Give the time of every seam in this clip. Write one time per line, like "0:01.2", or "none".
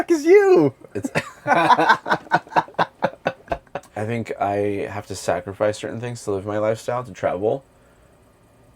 0:03.8